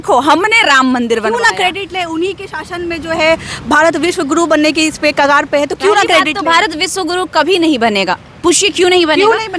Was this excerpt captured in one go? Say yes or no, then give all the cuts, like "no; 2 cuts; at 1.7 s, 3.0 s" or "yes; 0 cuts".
yes; 0 cuts